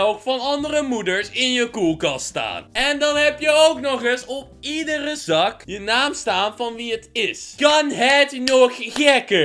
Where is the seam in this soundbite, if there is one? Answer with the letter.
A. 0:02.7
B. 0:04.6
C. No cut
C